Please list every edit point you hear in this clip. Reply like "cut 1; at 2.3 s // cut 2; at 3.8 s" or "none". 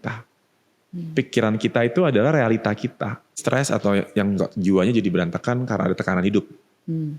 cut 1; at 3.4 s